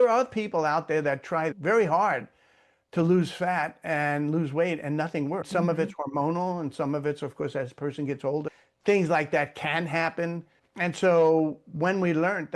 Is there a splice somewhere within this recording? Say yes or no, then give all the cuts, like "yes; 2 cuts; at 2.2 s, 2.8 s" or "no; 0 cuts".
yes; 2 cuts; at 5.5 s, 8.5 s